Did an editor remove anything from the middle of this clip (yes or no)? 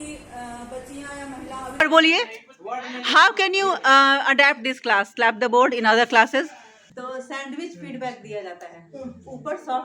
yes